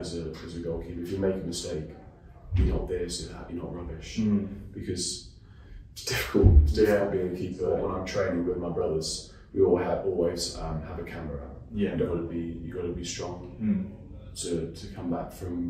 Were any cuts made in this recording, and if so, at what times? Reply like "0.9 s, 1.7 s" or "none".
7.8 s, 11.9 s